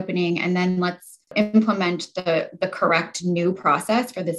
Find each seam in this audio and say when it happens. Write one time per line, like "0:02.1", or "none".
0:01.3